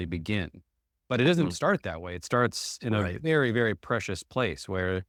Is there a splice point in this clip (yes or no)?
no